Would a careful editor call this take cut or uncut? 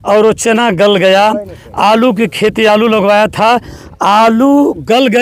uncut